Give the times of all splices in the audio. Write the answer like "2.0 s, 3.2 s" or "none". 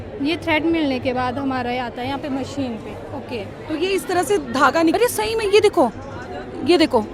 4.9 s

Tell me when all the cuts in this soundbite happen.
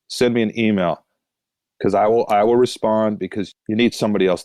3.5 s

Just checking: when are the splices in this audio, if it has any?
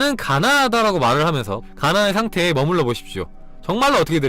1.6 s

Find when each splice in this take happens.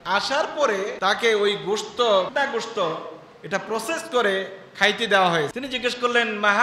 0.9 s, 2.3 s, 5.5 s

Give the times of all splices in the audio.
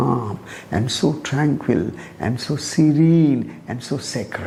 none

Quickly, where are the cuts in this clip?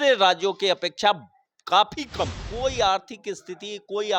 2.4 s

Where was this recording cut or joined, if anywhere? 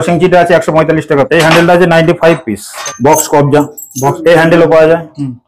1.3 s, 2.7 s, 4.2 s

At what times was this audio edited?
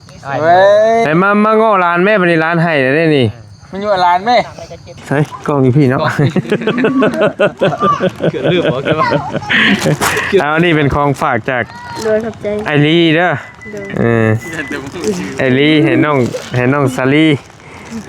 4.9 s

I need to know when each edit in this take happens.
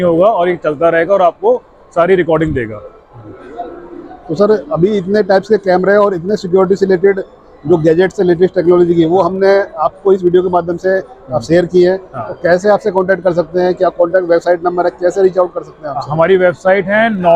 none

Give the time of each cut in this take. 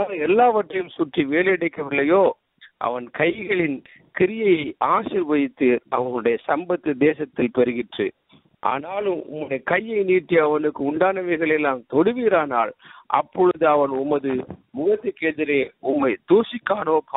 none

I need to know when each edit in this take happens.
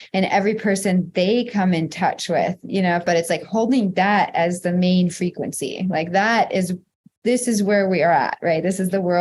3.0 s

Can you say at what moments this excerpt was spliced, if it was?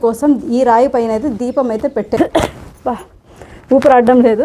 2.2 s

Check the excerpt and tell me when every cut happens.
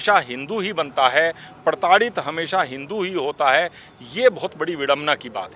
none

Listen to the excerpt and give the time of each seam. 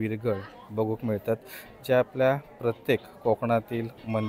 none

